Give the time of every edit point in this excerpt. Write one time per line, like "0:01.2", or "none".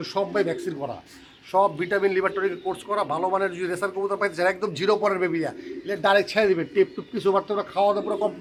none